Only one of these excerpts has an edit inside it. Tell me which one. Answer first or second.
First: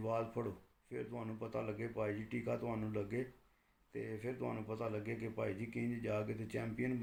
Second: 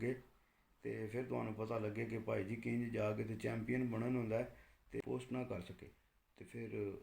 second